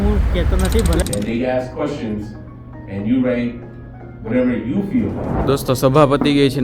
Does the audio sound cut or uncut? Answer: cut